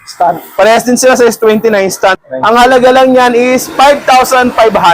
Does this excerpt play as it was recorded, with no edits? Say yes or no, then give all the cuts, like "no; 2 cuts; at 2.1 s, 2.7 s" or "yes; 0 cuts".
no; 1 cut; at 2.2 s